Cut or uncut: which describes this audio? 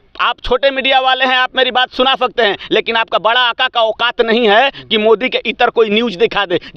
uncut